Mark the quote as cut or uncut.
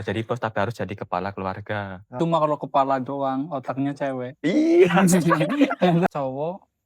cut